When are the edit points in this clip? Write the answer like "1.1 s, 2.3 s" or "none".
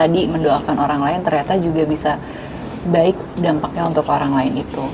none